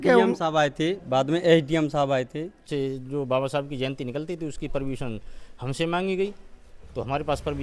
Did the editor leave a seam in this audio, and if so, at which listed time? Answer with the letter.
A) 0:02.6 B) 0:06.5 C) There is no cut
A